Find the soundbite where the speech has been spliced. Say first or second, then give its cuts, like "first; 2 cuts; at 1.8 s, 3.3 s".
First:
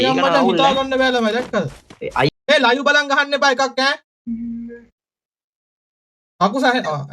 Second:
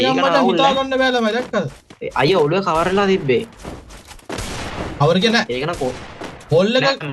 first; 1 cut; at 2.3 s